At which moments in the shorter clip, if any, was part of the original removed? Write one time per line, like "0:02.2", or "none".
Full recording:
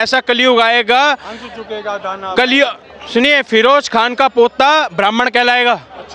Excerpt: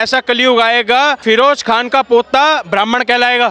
0:01.2